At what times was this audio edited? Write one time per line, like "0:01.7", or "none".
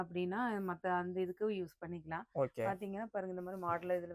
none